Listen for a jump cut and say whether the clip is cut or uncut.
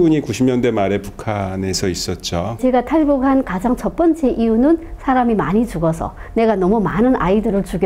cut